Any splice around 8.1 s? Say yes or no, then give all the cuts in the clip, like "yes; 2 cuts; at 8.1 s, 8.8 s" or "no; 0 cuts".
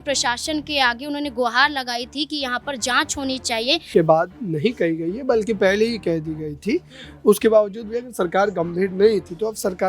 no; 1 cut; at 3.8 s